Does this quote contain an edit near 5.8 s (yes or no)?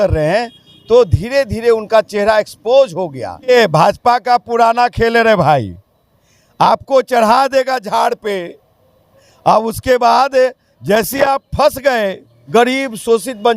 no